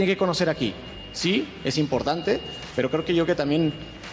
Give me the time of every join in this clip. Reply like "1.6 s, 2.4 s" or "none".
none